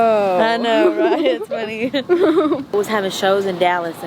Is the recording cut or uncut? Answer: cut